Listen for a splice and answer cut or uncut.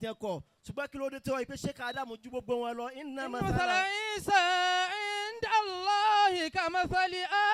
uncut